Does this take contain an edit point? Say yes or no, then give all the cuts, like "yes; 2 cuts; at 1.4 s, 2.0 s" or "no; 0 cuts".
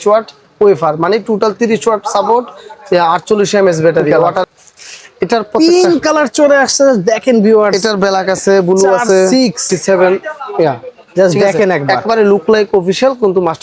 yes; 2 cuts; at 4.4 s, 9.6 s